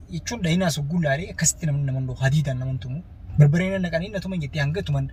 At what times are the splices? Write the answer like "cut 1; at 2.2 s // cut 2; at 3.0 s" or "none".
none

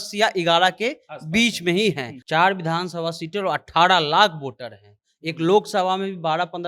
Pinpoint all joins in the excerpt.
cut 1; at 2.1 s

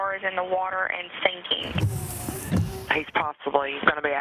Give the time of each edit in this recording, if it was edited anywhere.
cut 1; at 1.6 s

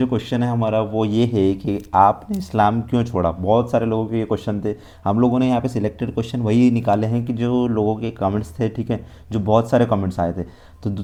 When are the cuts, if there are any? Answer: none

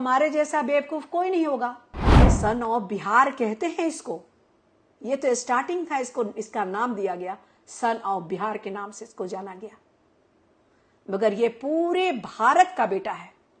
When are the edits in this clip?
cut 1; at 2.3 s

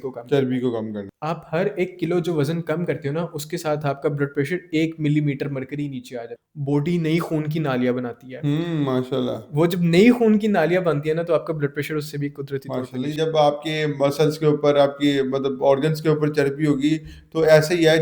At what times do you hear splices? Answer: cut 1; at 1.1 s // cut 2; at 6.2 s // cut 3; at 13.1 s

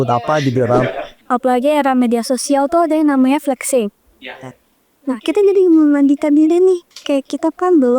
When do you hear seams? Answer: cut 1; at 1.1 s

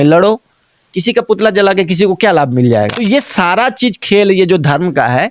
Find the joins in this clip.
cut 1; at 3.0 s

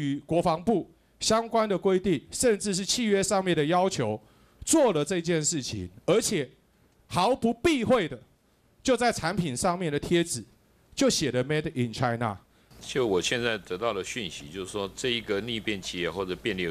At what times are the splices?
cut 1; at 12.6 s

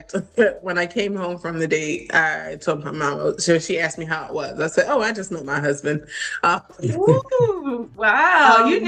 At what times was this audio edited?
none

